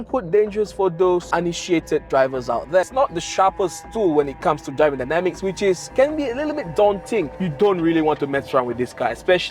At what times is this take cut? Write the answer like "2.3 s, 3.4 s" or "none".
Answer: 2.9 s, 7.3 s